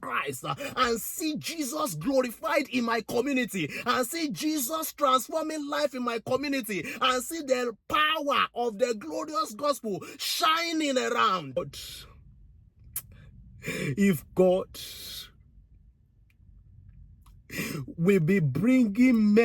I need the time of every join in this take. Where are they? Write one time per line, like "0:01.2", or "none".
0:11.6